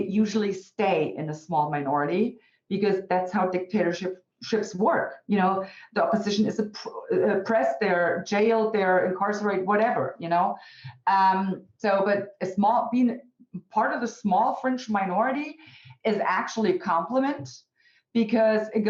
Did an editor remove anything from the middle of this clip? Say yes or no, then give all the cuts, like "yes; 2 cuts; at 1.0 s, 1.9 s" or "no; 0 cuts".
no; 0 cuts